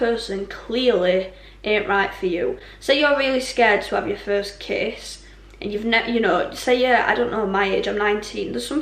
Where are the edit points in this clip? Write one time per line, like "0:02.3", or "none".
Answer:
none